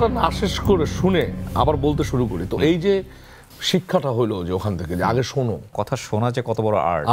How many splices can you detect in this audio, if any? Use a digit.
1